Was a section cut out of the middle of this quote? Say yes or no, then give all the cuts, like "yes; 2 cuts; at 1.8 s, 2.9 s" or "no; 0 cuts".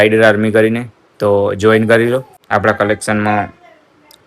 yes; 1 cut; at 2.4 s